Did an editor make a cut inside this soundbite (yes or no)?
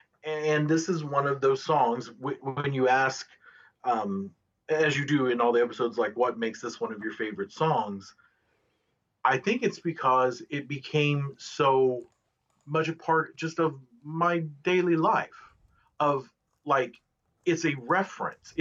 no